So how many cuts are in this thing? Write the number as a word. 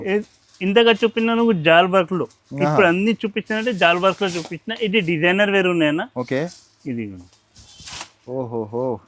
zero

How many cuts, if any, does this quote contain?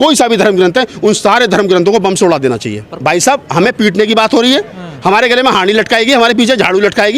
one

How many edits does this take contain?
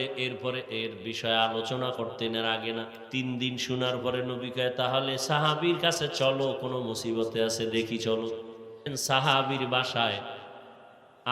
two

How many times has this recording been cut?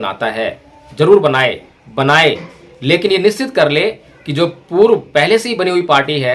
one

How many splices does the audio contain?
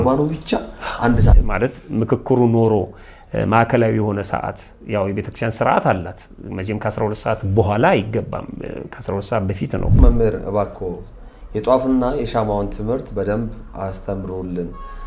two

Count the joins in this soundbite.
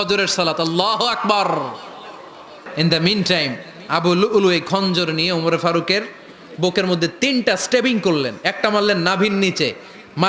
one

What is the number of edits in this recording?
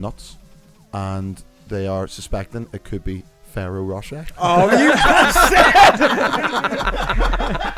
zero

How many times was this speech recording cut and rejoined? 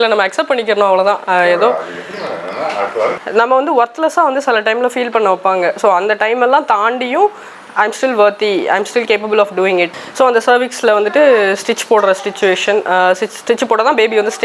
two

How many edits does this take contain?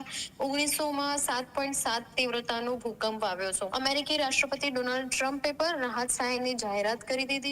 one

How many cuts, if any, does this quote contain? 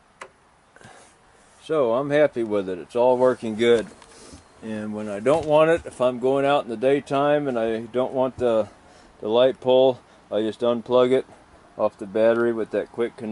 zero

